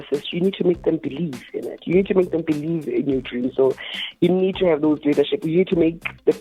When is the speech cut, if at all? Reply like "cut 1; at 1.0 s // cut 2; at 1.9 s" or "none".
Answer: none